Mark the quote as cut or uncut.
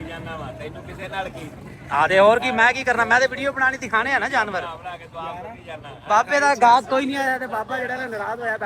uncut